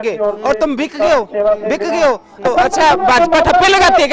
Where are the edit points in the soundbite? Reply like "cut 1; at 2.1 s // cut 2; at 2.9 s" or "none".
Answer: cut 1; at 2.4 s